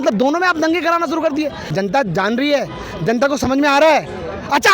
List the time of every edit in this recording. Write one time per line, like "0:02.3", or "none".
0:01.6